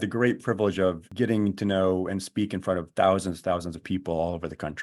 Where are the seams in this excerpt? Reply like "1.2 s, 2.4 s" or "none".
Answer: 1.1 s